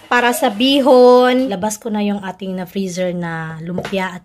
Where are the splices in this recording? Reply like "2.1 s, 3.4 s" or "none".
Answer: 1.5 s